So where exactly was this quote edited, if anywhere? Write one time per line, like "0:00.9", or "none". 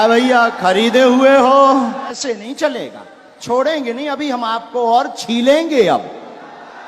0:02.2